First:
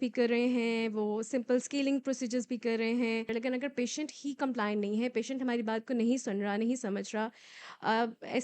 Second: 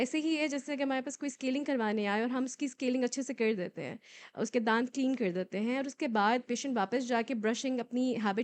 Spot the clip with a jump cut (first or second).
first